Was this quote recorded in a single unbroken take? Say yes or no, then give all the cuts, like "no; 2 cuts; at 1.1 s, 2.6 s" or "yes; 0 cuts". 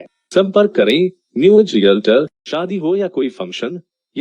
no; 1 cut; at 2.4 s